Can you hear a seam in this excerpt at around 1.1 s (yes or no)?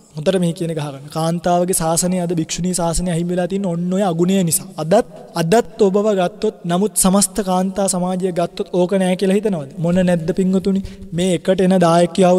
no